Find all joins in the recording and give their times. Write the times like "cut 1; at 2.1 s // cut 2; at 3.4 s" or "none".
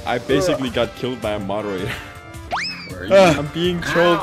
cut 1; at 2.4 s // cut 2; at 3.4 s